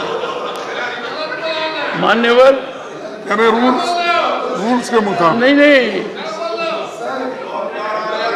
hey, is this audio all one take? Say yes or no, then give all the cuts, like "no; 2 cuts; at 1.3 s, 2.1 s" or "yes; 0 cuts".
yes; 0 cuts